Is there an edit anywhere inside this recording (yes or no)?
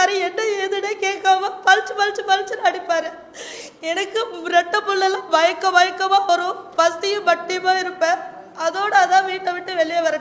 no